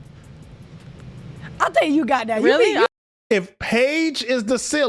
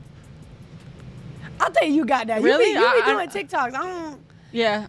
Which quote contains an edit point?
first; 1 cut; at 2.9 s

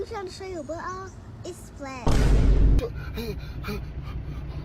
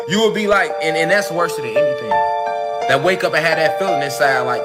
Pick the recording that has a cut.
first; 1 cut; at 2.8 s

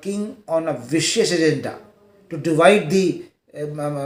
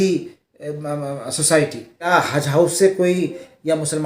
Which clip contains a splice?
second; 1 cut; at 2.1 s

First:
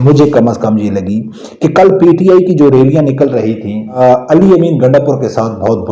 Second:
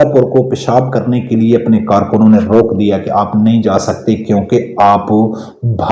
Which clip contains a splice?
first; 1 cut; at 4.0 s

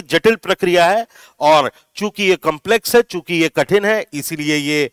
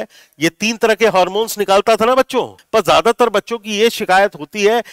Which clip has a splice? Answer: second; 1 cut; at 2.6 s

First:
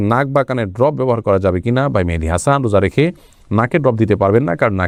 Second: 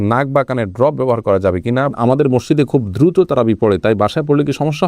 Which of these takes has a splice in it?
second; 1 cut; at 1.9 s

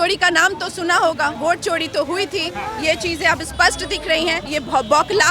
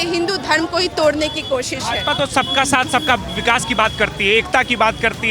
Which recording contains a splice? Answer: first; 2 cuts; at 1.3 s, 4.4 s

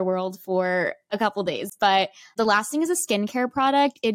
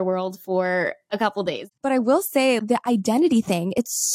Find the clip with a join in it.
second; 1 cut; at 1.7 s

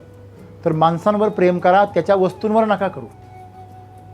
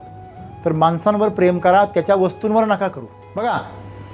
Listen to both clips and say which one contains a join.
second; 1 cut; at 3.2 s

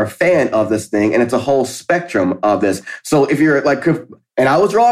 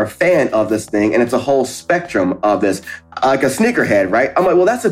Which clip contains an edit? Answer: second; 1 cut; at 3.0 s

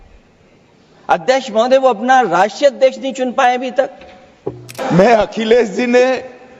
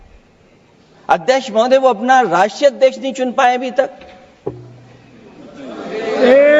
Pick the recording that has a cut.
first; 1 cut; at 4.7 s

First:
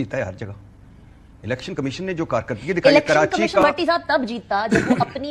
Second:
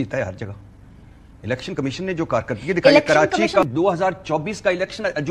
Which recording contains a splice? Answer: second; 1 cut; at 3.6 s

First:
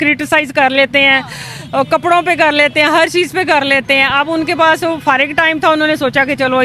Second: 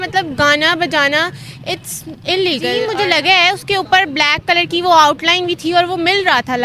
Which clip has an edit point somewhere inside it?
second; 1 cut; at 2.9 s

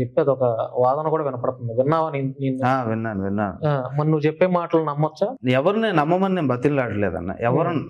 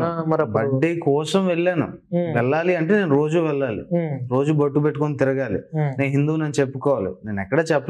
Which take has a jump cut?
first; 1 cut; at 5.4 s

